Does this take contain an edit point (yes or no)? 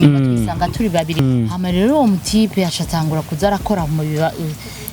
yes